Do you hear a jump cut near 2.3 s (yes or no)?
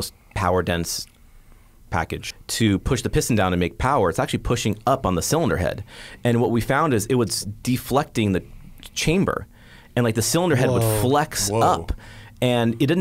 yes